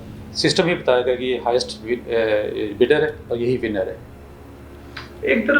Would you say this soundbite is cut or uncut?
uncut